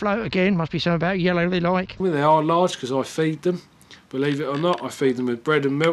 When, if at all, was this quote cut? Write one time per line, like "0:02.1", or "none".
0:02.0